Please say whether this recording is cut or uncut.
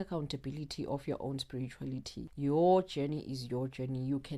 cut